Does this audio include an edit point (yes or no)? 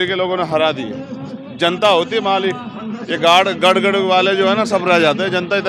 no